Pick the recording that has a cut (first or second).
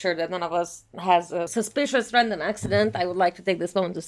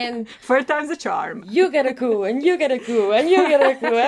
first